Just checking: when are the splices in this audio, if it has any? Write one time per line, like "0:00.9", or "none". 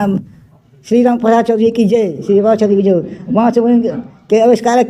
none